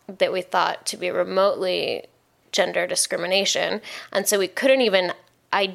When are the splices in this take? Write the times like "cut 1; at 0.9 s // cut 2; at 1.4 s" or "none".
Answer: none

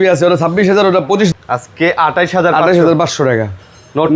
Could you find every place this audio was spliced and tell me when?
cut 1; at 1.3 s

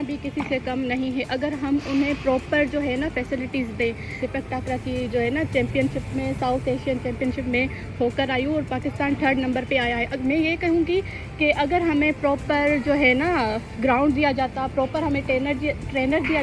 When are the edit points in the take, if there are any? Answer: none

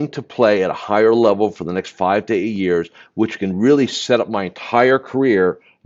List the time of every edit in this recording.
none

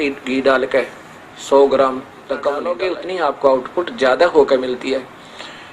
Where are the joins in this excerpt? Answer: cut 1; at 2.7 s

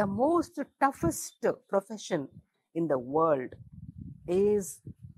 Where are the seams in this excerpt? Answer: none

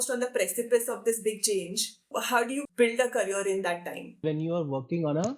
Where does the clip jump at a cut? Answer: cut 1; at 2.6 s // cut 2; at 4.2 s

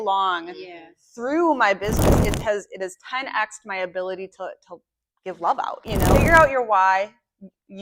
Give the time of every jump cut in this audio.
cut 1; at 6.1 s

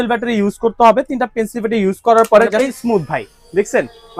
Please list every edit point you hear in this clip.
cut 1; at 2.7 s

